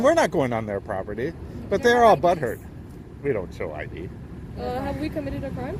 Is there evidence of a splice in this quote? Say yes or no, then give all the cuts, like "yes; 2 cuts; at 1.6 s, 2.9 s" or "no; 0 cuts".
no; 0 cuts